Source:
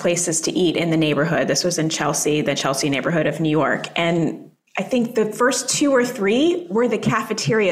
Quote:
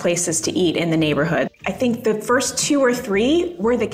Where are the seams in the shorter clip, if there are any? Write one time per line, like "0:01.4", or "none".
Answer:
0:01.5